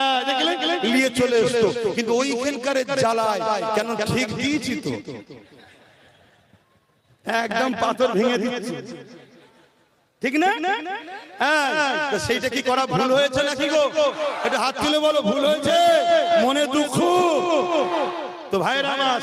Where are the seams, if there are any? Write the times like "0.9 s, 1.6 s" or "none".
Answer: none